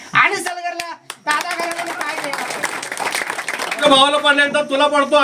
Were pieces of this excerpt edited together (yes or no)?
yes